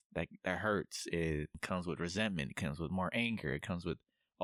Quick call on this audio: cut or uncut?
uncut